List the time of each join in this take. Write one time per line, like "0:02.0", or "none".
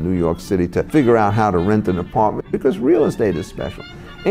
0:00.9
0:02.5